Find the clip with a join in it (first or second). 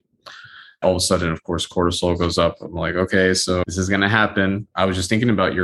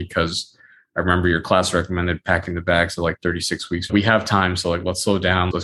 first